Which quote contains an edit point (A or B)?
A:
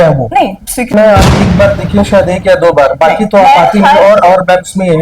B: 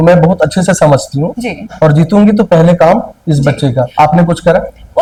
A